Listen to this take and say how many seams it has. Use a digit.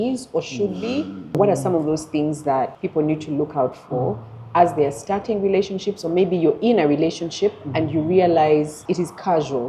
3